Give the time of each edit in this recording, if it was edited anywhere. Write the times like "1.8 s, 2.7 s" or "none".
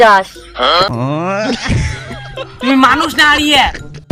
0.9 s